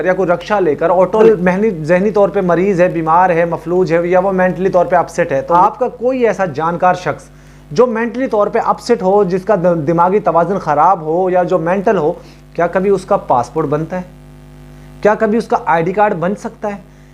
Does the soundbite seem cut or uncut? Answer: cut